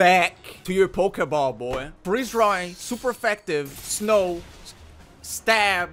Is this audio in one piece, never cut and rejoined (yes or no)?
no